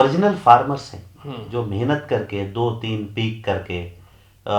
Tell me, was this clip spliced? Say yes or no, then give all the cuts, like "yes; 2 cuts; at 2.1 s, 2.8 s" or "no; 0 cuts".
no; 0 cuts